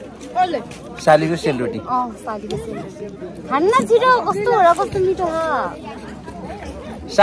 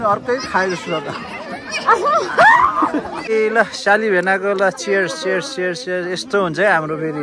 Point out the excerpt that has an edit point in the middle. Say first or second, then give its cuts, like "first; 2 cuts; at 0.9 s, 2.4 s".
second; 1 cut; at 3.3 s